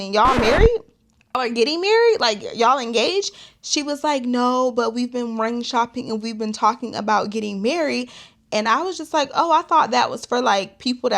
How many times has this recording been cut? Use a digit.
1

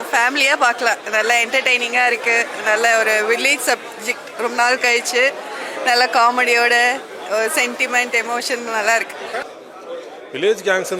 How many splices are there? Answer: 1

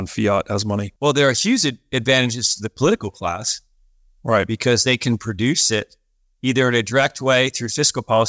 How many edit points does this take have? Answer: 1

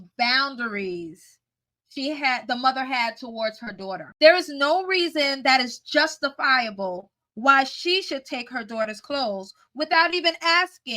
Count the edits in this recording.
1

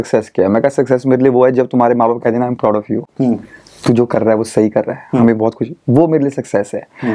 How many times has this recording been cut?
0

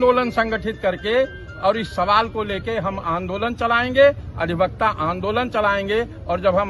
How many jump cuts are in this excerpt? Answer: 0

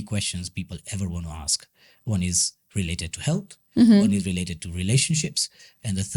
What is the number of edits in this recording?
0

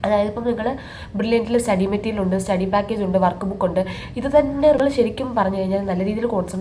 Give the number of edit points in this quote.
1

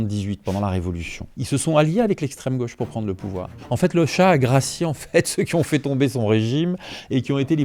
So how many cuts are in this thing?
2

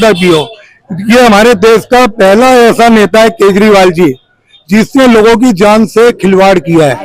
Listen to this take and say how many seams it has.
0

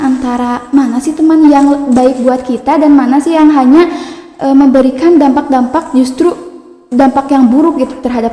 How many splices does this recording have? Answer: 0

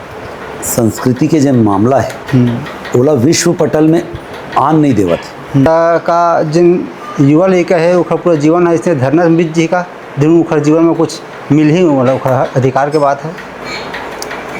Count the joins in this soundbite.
1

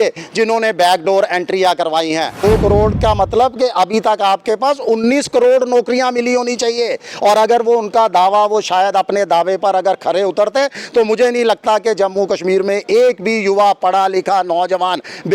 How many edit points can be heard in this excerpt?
1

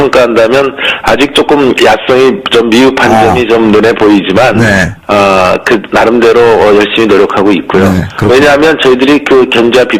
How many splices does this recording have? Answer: 0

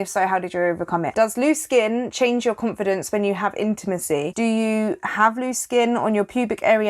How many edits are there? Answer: 2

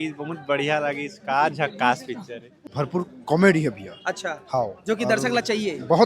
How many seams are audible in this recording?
1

